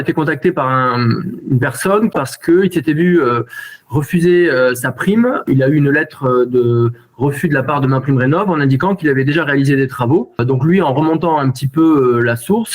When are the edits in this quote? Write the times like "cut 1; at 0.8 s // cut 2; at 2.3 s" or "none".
cut 1; at 2.2 s // cut 2; at 5.4 s // cut 3; at 10.4 s